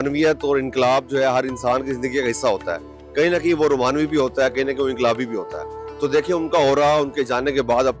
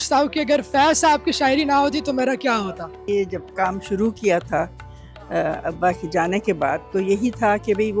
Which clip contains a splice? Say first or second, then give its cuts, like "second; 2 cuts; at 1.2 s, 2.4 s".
second; 1 cut; at 3.0 s